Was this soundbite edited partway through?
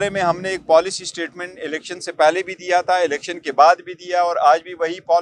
no; 0 cuts

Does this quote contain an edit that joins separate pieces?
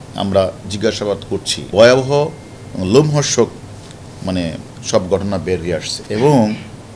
no; 0 cuts

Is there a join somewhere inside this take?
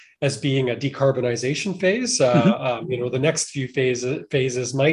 no; 0 cuts

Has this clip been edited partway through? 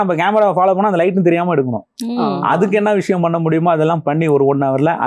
no; 0 cuts

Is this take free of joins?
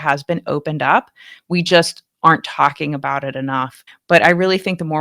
no; 1 cut; at 3.9 s

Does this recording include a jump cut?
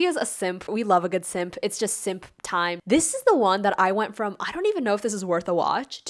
yes; 1 cut; at 2.8 s

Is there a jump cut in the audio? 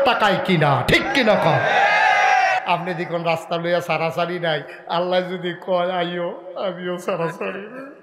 yes; 1 cut; at 2.6 s

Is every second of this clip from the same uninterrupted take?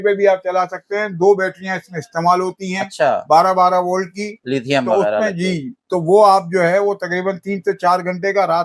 yes; 0 cuts

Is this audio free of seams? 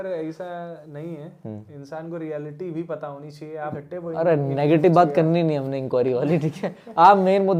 no; 1 cut; at 3.7 s

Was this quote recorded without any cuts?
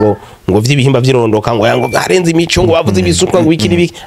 yes; 0 cuts

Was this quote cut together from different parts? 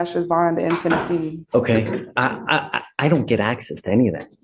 yes; 1 cut; at 1.4 s

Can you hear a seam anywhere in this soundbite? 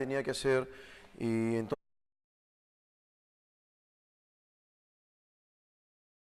no; 0 cuts

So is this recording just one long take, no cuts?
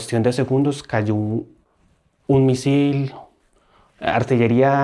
yes; 0 cuts

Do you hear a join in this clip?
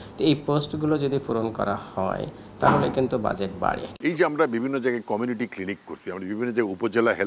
yes; 1 cut; at 3.9 s

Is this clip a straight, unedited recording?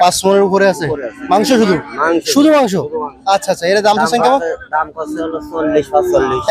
yes; 0 cuts

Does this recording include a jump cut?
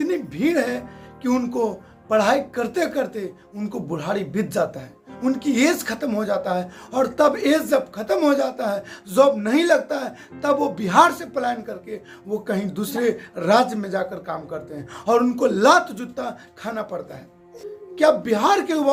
no; 0 cuts

